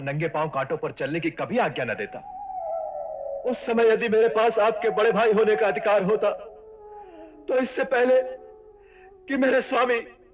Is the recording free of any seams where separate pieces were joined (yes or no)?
no